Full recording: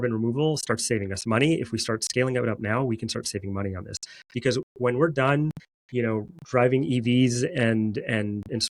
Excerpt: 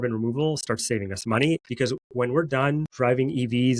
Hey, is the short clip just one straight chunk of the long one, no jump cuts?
no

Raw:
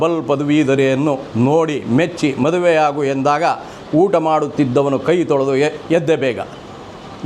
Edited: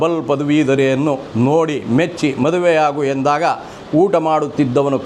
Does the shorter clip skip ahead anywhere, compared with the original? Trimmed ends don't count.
no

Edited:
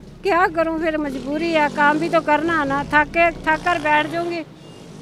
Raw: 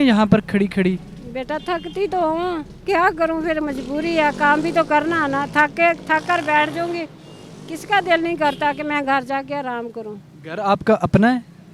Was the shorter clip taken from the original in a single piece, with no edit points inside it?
yes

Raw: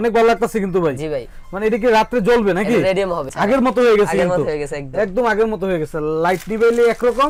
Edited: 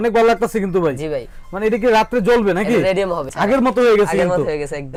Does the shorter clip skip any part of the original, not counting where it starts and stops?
no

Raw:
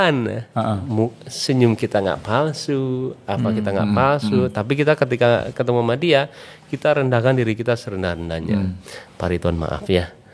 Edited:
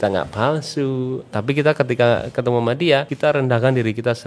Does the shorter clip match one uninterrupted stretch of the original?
no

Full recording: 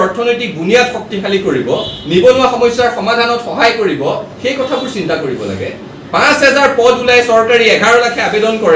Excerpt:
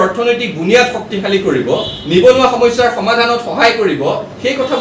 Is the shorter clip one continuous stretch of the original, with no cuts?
yes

